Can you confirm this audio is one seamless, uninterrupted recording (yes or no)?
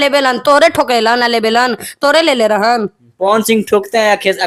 yes